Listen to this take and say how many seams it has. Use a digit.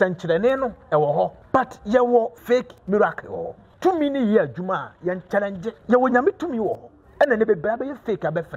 4